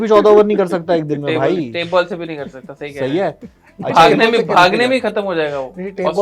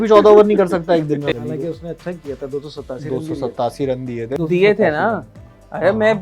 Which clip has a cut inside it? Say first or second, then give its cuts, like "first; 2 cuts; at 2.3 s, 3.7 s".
second; 2 cuts; at 1.3 s, 4.4 s